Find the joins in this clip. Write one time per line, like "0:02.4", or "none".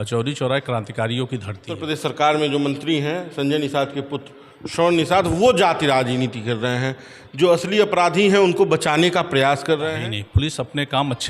0:01.7
0:09.9